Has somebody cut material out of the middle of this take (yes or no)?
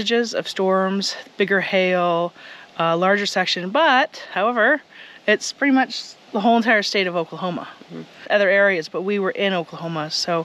yes